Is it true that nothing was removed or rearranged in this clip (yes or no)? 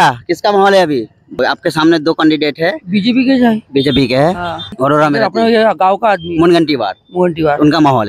no